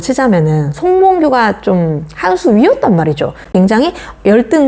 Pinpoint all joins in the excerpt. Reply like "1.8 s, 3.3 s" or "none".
3.5 s

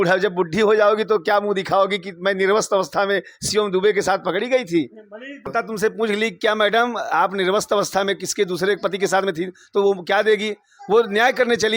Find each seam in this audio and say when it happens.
5.4 s

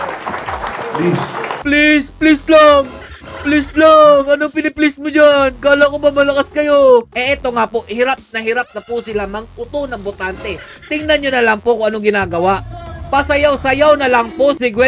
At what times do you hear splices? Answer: 1.1 s, 7.1 s

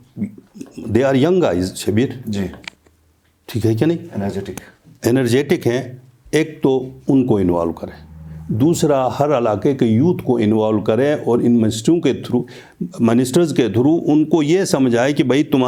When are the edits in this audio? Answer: none

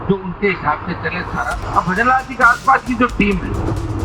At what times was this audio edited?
1.6 s

